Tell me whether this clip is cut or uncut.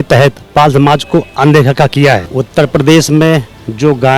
cut